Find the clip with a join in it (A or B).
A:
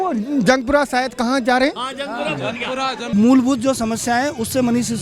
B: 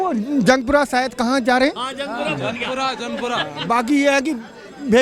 A